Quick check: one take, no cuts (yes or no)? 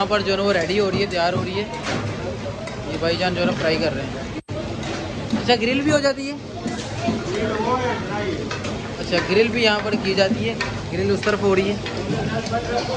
yes